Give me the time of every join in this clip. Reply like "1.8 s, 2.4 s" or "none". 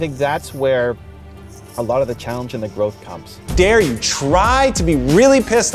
3.4 s